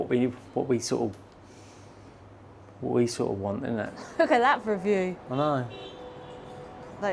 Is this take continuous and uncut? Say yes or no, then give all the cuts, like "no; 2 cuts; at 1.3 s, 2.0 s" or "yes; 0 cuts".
no; 1 cut; at 4.0 s